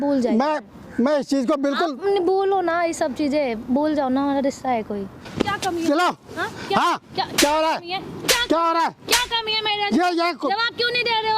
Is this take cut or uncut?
cut